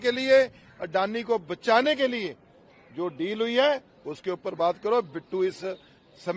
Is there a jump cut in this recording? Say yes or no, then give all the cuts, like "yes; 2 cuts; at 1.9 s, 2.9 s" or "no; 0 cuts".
no; 0 cuts